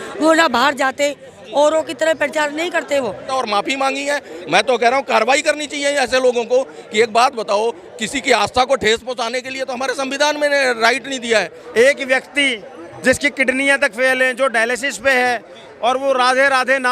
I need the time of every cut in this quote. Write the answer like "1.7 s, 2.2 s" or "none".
3.3 s, 11.7 s